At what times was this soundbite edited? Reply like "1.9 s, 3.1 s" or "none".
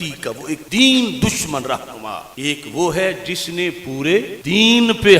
2.2 s